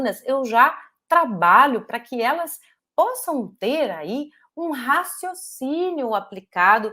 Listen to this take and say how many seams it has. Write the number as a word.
zero